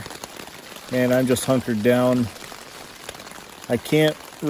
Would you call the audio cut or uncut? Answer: uncut